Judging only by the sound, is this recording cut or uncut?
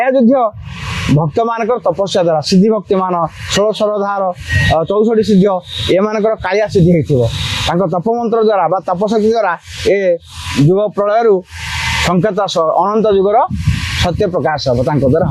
uncut